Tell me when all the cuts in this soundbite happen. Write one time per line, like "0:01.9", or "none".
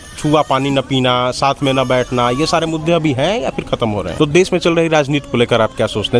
0:04.1